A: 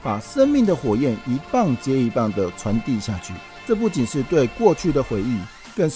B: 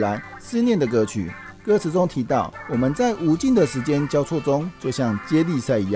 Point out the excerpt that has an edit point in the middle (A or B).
B